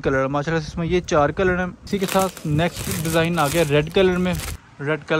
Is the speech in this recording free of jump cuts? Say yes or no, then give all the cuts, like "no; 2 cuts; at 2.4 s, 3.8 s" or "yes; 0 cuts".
yes; 0 cuts